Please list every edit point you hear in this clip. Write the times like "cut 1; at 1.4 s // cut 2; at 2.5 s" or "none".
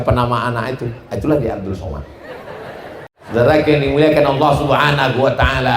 cut 1; at 3.2 s